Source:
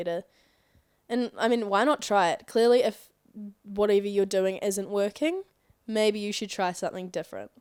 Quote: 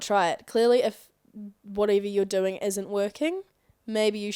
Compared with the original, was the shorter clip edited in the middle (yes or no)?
no